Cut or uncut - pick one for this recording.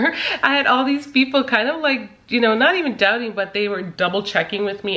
uncut